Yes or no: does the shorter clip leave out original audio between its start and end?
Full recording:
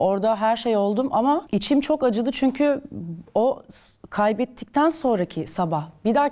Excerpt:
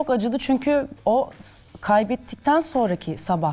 yes